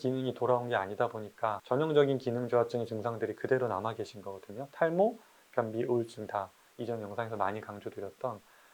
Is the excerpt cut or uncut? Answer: uncut